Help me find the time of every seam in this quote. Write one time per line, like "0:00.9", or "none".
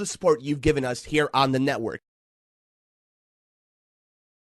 none